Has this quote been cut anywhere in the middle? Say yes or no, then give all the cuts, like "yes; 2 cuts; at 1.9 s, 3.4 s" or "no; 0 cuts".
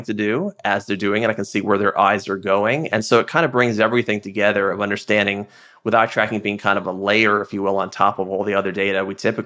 no; 0 cuts